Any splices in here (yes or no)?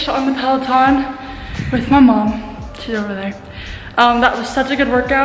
no